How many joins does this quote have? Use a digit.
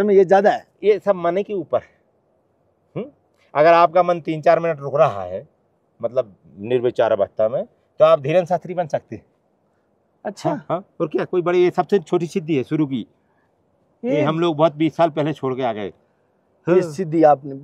0